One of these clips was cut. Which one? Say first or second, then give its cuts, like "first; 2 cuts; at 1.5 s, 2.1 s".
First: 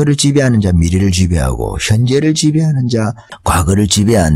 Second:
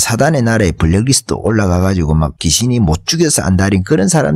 second; 1 cut; at 2.4 s